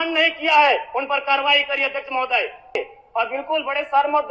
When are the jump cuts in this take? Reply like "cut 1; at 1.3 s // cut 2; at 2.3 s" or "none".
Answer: cut 1; at 2.8 s